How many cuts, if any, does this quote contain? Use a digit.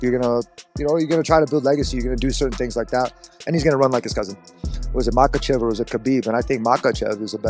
1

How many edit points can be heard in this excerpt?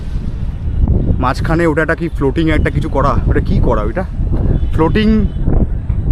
0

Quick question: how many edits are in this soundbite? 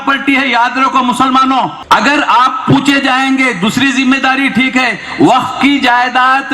1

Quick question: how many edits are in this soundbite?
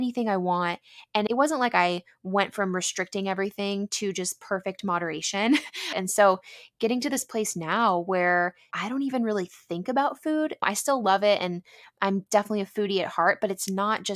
1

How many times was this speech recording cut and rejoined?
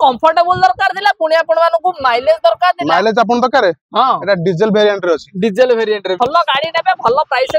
1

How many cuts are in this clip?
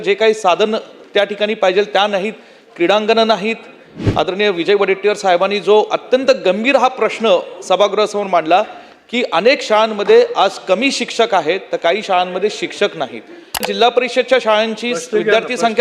2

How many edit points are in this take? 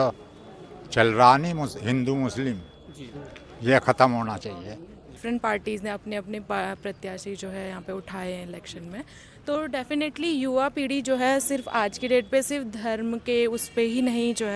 1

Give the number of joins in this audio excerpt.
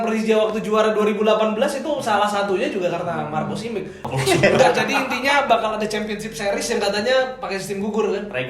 1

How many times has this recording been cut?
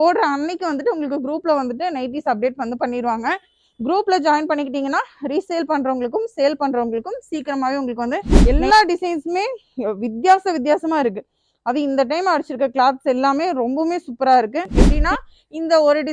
2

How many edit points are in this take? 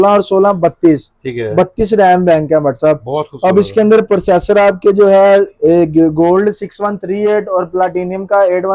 0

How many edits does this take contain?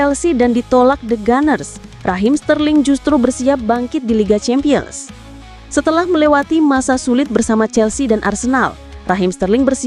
0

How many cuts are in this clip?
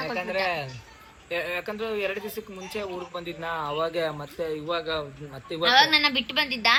0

